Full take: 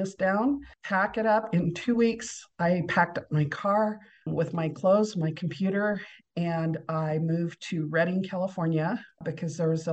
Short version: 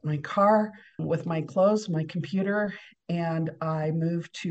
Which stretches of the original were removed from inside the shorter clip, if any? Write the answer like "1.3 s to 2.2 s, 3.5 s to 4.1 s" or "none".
none